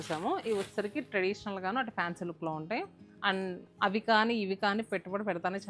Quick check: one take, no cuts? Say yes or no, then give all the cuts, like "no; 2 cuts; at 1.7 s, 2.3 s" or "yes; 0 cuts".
yes; 0 cuts